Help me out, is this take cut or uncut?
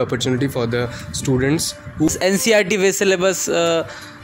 cut